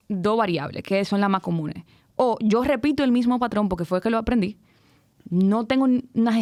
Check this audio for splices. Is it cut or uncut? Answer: uncut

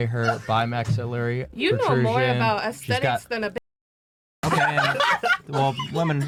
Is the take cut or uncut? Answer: uncut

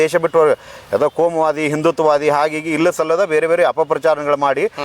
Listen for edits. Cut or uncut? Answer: uncut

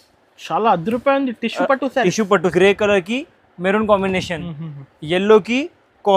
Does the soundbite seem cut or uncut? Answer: cut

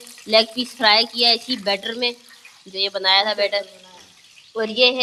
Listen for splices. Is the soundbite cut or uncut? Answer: uncut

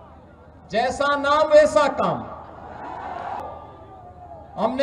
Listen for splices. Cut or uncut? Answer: cut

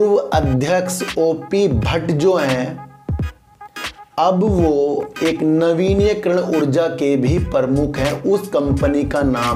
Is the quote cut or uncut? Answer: uncut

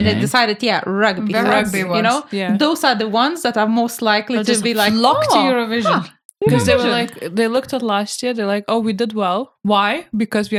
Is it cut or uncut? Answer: uncut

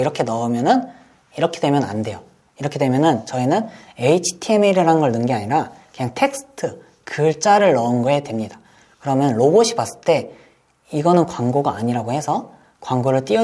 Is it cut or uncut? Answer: uncut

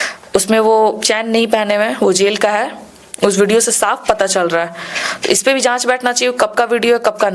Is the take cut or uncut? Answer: uncut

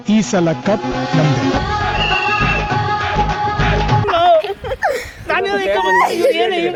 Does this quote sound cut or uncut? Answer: uncut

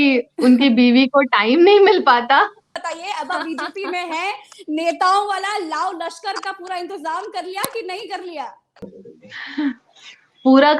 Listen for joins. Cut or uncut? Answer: cut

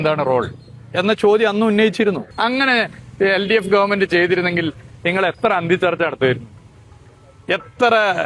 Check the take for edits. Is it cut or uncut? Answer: cut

